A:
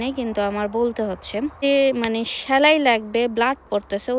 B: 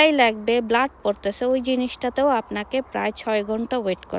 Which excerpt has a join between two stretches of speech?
A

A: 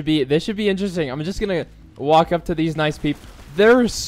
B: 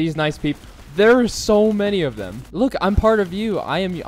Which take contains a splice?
B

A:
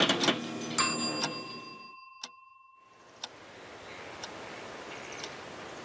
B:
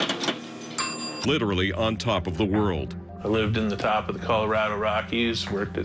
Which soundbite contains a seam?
A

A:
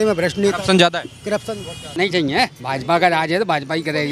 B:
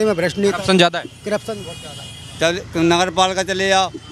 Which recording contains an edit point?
A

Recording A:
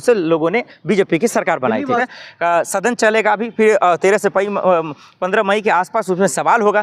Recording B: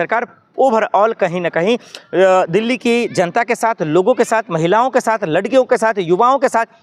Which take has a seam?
A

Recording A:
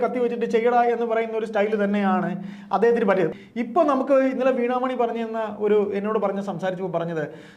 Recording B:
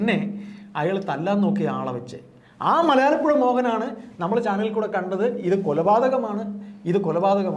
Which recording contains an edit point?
A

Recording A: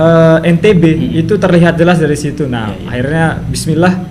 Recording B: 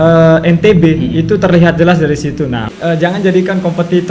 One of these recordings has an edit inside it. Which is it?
B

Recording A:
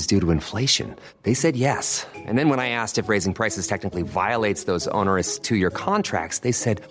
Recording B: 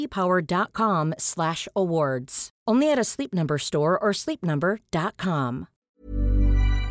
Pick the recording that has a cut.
B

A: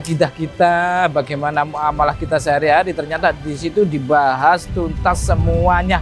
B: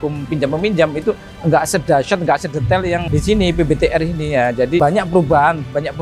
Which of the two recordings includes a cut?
B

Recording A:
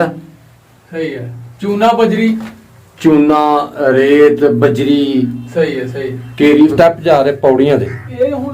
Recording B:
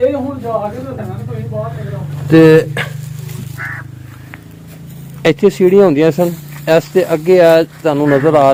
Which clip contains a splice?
A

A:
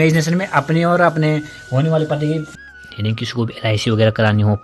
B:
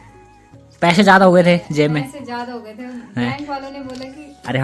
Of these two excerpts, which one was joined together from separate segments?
A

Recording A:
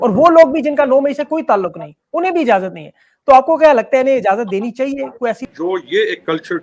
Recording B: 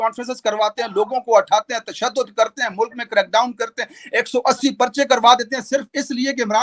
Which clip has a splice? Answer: A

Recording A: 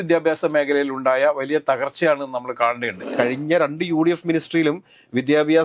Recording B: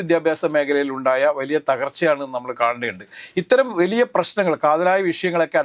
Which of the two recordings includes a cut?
A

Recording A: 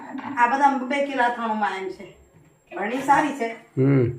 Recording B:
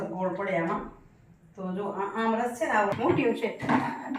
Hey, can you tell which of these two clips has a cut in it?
B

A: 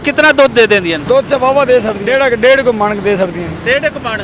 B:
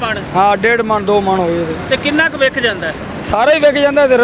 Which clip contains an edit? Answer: A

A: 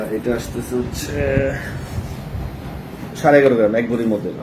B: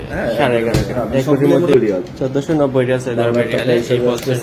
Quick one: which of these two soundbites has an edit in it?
B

